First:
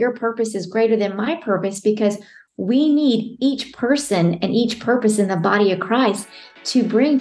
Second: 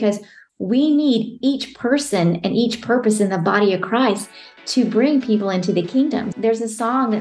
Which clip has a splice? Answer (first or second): second